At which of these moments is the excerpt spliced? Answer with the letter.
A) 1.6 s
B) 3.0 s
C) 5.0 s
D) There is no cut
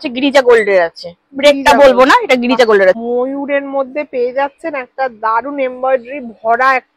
B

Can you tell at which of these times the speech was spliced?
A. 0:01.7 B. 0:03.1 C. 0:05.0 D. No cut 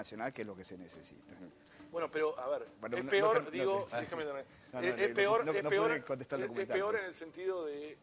D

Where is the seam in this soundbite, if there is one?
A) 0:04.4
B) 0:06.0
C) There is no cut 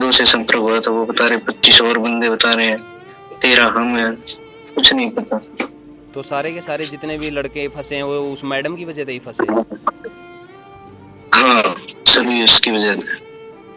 C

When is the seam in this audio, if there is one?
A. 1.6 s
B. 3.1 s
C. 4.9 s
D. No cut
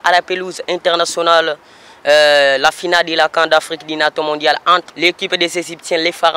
C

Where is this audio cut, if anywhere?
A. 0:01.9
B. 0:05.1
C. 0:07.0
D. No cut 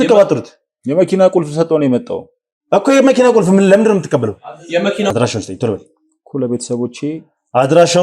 B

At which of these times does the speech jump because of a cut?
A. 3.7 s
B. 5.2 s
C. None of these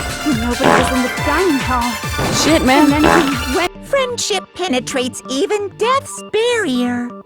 A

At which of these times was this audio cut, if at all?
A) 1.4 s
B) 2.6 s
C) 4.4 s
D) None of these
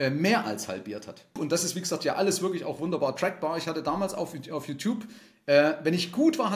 A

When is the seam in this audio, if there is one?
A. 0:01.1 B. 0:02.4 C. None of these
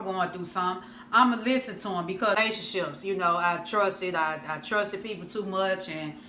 B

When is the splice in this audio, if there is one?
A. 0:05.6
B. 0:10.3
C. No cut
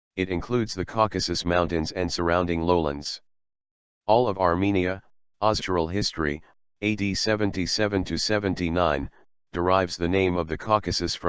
C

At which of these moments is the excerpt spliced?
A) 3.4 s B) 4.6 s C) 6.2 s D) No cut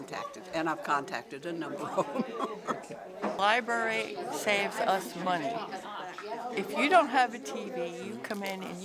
A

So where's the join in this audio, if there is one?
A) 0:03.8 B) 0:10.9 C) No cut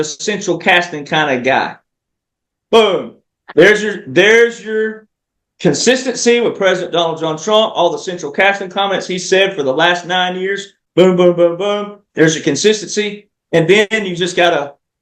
C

